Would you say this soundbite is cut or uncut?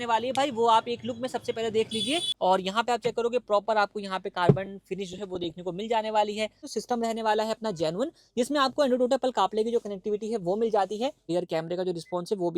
cut